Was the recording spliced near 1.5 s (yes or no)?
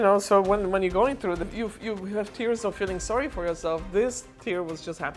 yes